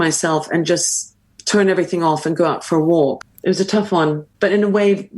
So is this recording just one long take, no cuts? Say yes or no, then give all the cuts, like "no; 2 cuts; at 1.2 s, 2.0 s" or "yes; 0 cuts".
no; 2 cuts; at 3.3 s, 4.3 s